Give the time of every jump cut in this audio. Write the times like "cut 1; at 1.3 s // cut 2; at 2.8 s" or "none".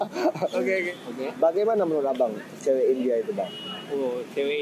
cut 1; at 0.9 s